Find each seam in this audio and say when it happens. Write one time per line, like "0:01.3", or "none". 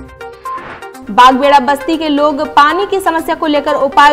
0:00.9